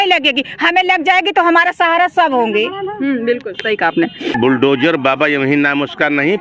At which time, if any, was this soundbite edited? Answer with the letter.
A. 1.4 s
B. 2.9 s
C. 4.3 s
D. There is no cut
C